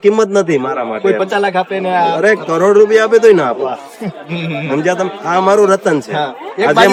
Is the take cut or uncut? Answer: uncut